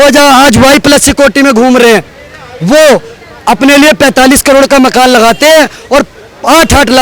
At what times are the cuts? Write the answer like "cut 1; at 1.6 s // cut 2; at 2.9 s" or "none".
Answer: none